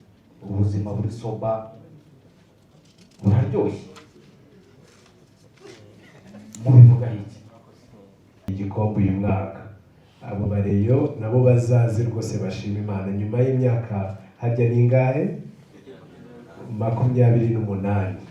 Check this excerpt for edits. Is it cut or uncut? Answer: cut